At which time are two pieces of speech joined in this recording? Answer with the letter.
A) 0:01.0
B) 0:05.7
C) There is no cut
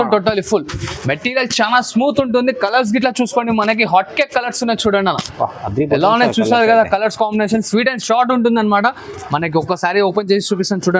C